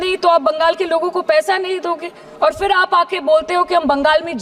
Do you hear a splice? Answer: no; 0 cuts

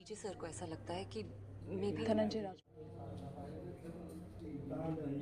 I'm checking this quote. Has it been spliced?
no; 0 cuts

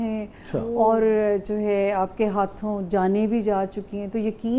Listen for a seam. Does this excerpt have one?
no; 0 cuts

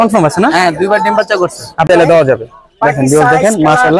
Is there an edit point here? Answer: yes; 1 cut; at 1.9 s

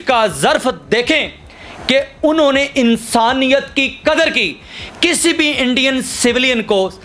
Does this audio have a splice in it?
no; 0 cuts

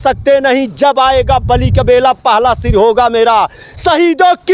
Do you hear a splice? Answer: no; 0 cuts

